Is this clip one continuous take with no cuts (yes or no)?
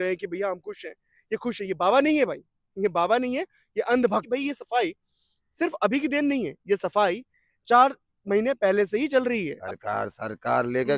no